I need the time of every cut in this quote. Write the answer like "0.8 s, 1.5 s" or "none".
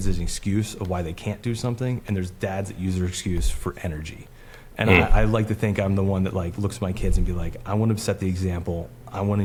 none